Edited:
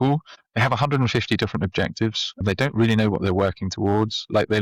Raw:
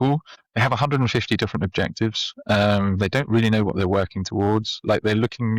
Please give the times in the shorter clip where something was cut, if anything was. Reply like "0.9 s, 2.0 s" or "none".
2.4 s